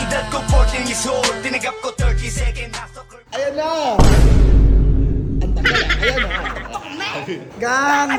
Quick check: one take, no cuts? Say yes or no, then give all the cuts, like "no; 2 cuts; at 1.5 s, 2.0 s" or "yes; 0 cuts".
yes; 0 cuts